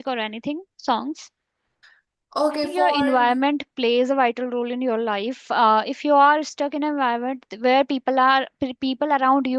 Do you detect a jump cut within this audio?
yes; 1 cut; at 2.9 s

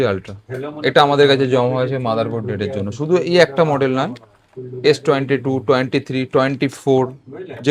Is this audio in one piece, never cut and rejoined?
yes; 0 cuts

